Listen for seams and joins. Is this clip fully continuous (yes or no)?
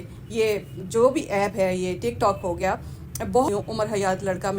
no